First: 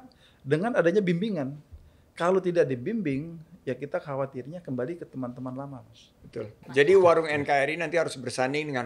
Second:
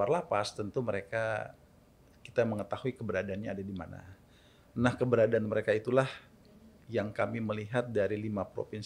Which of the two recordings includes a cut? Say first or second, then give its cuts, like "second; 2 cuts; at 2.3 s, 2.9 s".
first; 1 cut; at 6.6 s